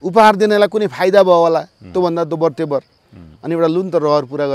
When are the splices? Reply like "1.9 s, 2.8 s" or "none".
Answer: none